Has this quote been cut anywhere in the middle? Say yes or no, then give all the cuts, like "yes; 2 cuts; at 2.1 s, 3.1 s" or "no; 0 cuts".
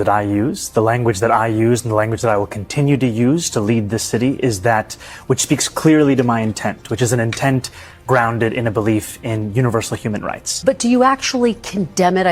no; 0 cuts